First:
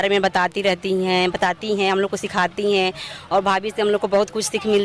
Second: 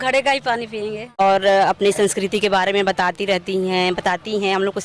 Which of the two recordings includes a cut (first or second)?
second